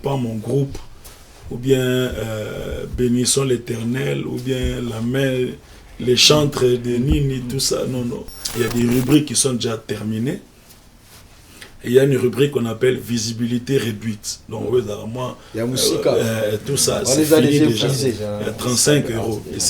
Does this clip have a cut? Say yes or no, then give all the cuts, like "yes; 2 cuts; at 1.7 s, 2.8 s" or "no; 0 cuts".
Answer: yes; 1 cut; at 8.4 s